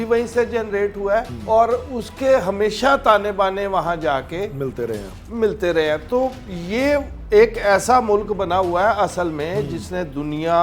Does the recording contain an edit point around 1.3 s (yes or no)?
yes